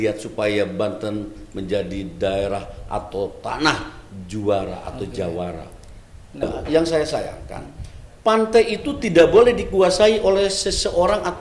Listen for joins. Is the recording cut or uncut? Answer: cut